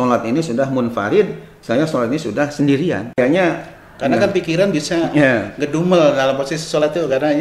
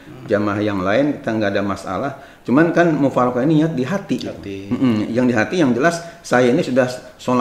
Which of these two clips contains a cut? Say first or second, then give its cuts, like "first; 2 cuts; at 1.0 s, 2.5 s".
first; 1 cut; at 3.1 s